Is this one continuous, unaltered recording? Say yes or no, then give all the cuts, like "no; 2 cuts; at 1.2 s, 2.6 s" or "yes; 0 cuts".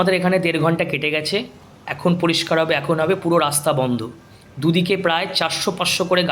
yes; 0 cuts